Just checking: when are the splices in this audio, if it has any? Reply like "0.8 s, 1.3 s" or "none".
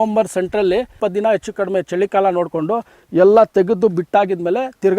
0.9 s